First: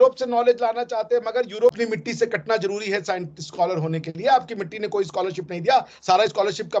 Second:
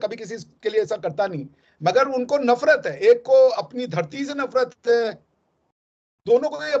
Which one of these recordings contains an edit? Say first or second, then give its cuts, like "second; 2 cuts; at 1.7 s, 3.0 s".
first; 1 cut; at 1.7 s